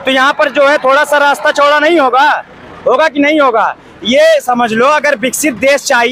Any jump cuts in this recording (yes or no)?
no